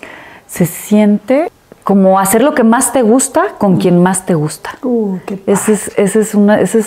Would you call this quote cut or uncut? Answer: cut